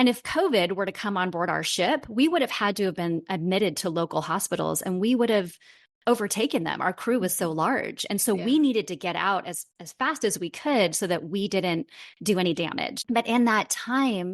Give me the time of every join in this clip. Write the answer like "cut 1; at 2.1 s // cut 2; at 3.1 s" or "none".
cut 1; at 12.9 s

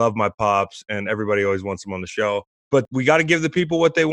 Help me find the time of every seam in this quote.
cut 1; at 2.8 s

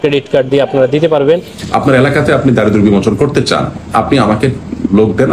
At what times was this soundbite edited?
cut 1; at 1.5 s

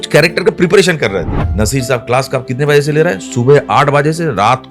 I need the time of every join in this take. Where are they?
cut 1; at 1.4 s

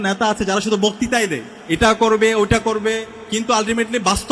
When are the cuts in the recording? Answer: cut 1; at 1.5 s // cut 2; at 3.1 s

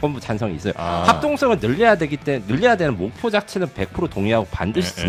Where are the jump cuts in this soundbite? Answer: none

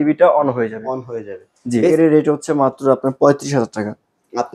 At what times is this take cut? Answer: cut 1; at 1.9 s

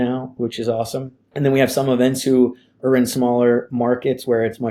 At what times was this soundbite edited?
cut 1; at 1.2 s

